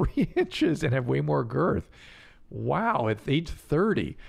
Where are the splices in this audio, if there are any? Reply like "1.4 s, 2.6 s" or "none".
none